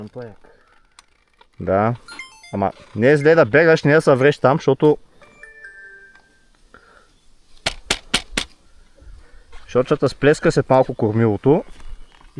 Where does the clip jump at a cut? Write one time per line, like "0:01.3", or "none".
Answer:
none